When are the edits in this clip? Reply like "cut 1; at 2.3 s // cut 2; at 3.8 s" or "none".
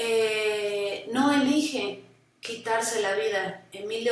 none